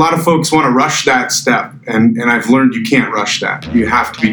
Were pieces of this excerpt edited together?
no; 0 cuts

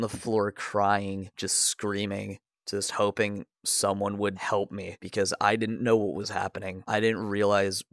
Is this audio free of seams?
yes; 0 cuts

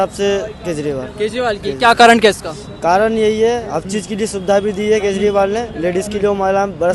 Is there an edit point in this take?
no; 0 cuts

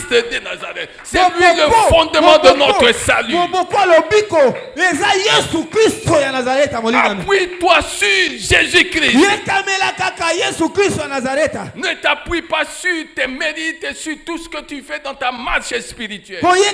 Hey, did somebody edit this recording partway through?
no; 0 cuts

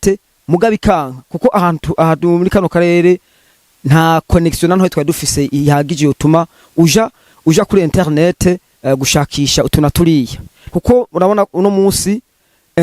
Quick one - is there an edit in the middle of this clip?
yes; 1 cut; at 10.7 s

